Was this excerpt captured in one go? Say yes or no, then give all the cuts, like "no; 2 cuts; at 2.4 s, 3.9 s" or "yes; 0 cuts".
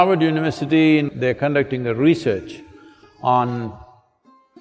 no; 1 cut; at 1.1 s